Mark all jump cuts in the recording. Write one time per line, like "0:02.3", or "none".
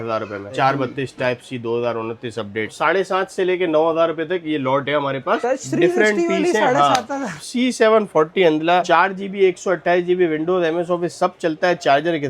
0:02.7
0:07.4
0:08.8